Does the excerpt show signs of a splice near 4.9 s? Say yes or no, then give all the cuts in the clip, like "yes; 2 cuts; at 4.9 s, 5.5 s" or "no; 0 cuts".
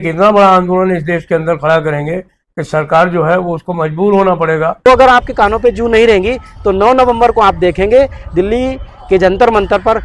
yes; 1 cut; at 4.9 s